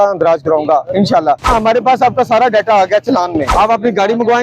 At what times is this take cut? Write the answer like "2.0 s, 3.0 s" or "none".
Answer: 1.5 s, 3.5 s